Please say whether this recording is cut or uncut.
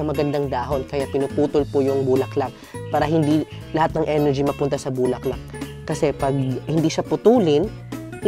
uncut